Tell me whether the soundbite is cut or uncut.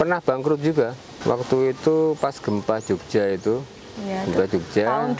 cut